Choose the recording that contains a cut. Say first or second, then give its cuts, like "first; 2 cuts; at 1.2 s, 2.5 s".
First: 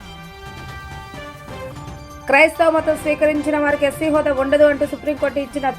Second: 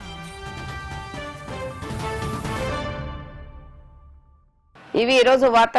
first; 1 cut; at 1.7 s